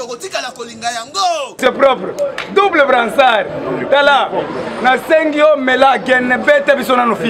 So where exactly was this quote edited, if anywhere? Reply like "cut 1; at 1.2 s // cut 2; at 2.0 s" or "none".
cut 1; at 1.6 s